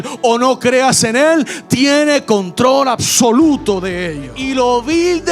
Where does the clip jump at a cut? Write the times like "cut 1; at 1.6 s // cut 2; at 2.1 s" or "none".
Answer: cut 1; at 4.4 s